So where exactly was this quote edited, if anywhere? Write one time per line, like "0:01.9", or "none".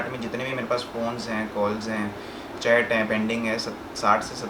none